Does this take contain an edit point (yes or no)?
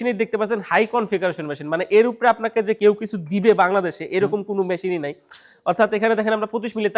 no